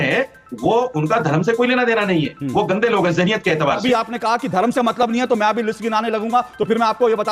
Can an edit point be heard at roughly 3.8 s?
yes; 1 cut; at 3.8 s

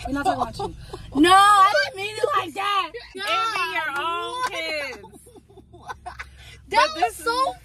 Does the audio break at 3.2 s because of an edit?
yes; 1 cut; at 3.2 s

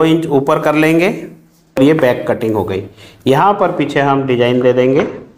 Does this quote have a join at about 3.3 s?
no; 1 cut; at 1.8 s

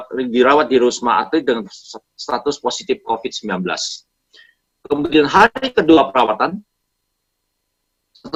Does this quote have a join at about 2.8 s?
no; 0 cuts

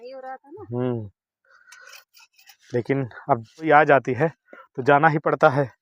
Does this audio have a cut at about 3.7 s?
yes; 1 cut; at 3.7 s

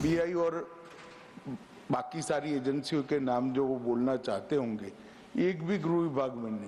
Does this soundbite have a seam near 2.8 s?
no; 0 cuts

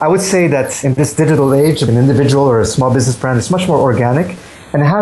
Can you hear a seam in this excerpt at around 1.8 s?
yes; 2 cuts; at 0.8 s, 1.8 s

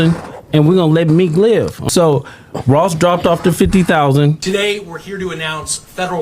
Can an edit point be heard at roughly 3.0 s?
no; 2 cuts; at 1.8 s, 4.4 s

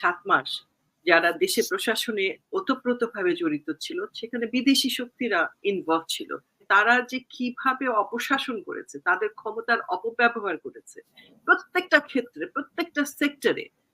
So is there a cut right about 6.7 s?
yes; 1 cut; at 6.7 s

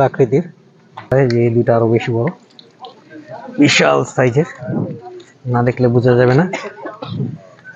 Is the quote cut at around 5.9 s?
no; 1 cut; at 1.1 s

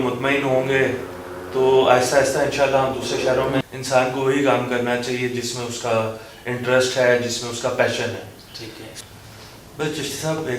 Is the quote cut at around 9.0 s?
yes; 2 cuts; at 3.6 s, 9.0 s

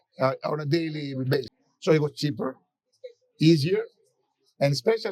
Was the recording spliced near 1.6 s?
yes; 1 cut; at 1.6 s

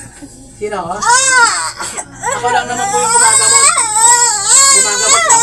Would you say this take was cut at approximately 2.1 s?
no; 0 cuts

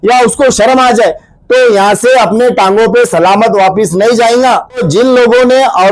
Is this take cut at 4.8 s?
yes; 1 cut; at 4.8 s

